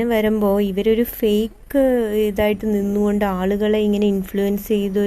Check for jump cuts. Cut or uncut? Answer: cut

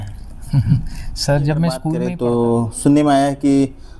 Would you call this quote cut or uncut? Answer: cut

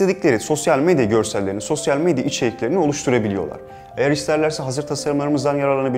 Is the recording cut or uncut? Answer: uncut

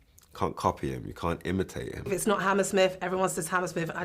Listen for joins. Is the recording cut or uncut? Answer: cut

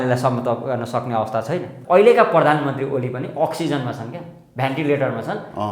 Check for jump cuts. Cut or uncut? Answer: cut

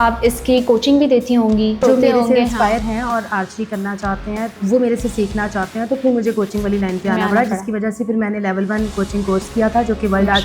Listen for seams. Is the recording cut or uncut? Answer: cut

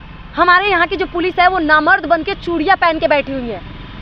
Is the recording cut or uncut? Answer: uncut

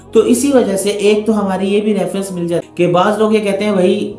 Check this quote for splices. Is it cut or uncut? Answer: cut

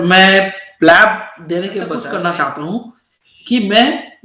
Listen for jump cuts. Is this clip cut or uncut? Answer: cut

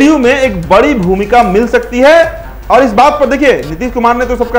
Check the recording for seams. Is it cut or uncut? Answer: uncut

